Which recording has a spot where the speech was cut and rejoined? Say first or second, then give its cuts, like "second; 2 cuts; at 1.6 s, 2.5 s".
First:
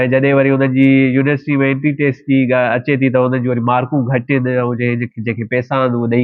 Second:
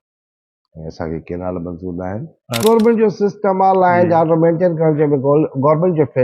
second; 1 cut; at 2.6 s